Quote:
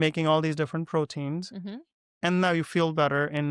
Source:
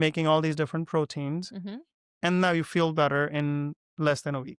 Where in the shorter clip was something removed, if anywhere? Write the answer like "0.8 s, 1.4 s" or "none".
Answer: none

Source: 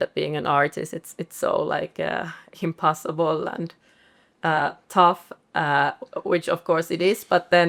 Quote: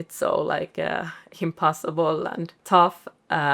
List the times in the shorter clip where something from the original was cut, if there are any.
2.6 s

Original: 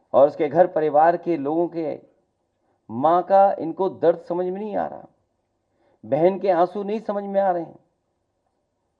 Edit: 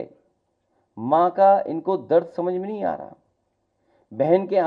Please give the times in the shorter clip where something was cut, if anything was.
none

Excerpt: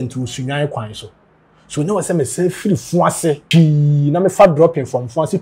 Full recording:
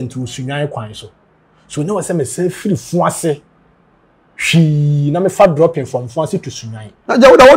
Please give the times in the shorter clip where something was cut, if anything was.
3.4 s

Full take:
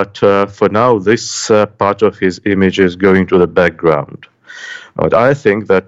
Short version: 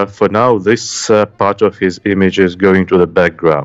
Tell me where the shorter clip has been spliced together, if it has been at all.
none

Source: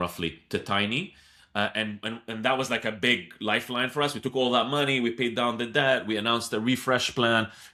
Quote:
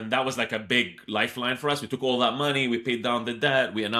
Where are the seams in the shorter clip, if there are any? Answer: none

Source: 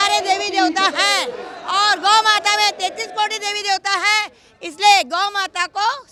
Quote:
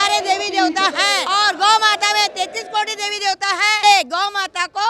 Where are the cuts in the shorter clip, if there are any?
1.2 s, 3.8 s

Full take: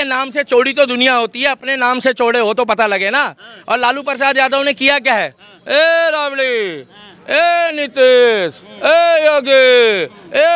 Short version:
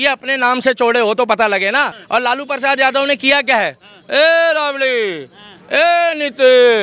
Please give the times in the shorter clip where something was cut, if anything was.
2.0 s

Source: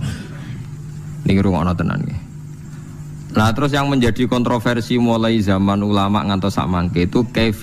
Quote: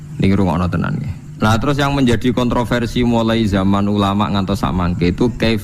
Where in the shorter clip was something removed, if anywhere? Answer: 1.2 s

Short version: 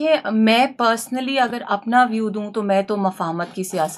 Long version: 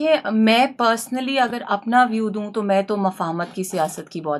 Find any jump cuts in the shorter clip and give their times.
none

